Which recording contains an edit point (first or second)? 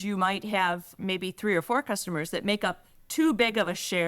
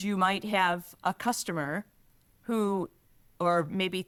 first